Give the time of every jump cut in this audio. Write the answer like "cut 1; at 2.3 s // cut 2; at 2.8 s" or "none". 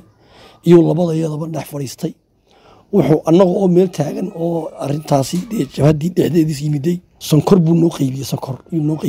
cut 1; at 7.1 s